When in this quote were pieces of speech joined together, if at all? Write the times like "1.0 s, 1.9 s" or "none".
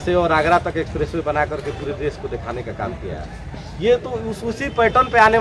none